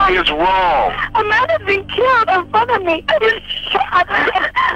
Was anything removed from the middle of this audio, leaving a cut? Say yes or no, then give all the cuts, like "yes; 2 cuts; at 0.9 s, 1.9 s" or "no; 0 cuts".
no; 0 cuts